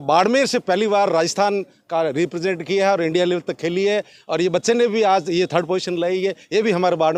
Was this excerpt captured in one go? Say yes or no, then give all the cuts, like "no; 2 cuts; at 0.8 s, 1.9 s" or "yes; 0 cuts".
yes; 0 cuts